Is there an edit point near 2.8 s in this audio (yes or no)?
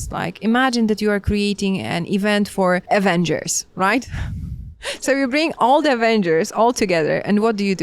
yes